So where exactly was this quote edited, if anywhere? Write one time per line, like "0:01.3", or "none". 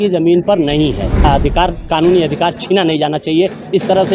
0:01.2